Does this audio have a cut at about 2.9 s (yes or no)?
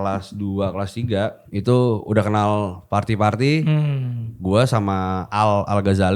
no